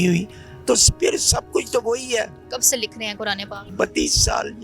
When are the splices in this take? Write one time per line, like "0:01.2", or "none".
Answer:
0:02.4
0:03.7